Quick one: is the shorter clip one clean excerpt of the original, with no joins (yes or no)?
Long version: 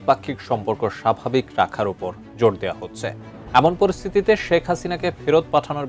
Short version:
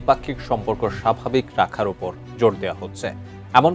yes